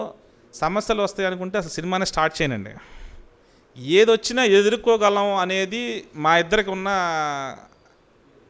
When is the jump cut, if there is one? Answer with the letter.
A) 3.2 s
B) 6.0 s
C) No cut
C